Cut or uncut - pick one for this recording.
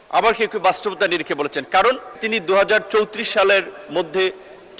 cut